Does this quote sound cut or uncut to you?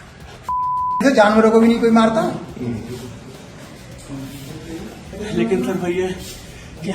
cut